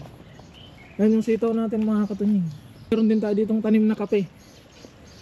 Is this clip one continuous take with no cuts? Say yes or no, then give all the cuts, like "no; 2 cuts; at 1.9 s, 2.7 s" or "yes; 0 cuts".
no; 1 cut; at 2.9 s